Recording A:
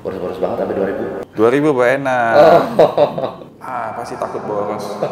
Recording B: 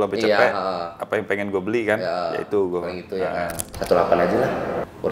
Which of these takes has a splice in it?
B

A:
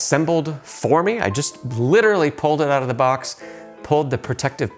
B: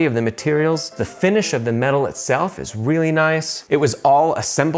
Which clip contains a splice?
B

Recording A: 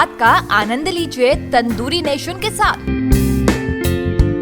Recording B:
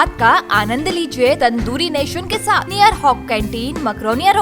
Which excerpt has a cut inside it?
B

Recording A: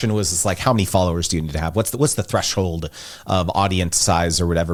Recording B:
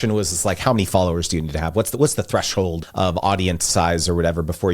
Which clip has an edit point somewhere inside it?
B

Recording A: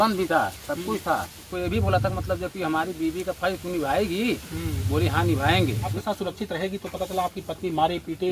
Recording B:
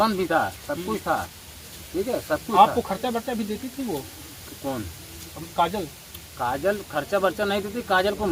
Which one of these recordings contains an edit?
A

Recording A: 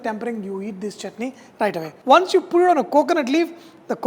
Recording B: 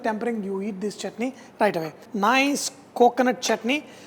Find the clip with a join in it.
A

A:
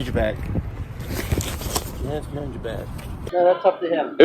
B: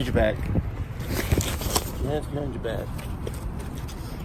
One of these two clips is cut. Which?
A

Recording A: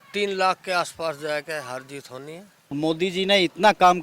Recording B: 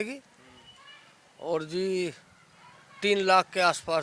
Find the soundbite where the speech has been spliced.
A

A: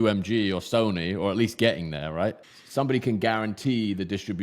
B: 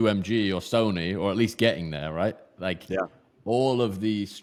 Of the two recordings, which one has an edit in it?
A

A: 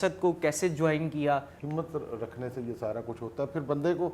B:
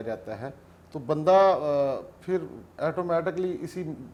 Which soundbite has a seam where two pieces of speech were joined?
A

